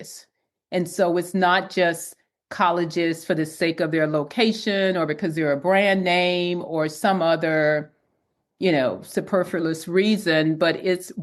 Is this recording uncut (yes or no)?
yes